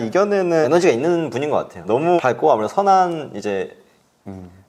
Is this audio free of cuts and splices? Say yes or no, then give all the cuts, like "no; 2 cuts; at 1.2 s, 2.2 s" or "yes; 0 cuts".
yes; 0 cuts